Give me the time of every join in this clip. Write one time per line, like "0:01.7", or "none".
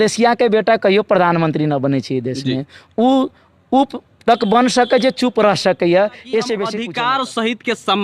0:06.8